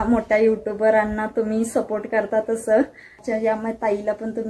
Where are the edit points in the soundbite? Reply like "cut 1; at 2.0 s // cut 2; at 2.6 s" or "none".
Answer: cut 1; at 3.2 s